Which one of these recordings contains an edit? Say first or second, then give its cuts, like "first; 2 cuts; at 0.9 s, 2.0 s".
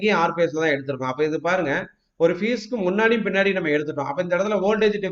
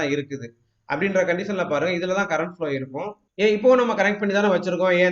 second; 1 cut; at 3.2 s